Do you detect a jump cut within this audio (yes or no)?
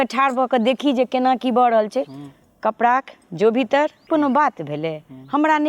yes